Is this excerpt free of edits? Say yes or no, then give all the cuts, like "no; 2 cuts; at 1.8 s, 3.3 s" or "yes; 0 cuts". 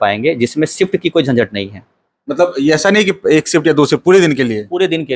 yes; 0 cuts